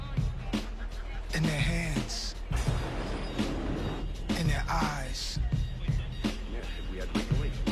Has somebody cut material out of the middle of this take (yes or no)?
no